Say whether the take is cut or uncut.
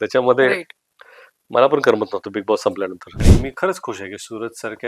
cut